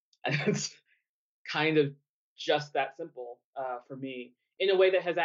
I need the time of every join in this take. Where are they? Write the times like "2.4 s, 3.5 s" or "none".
none

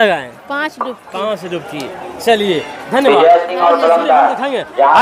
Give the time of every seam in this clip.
none

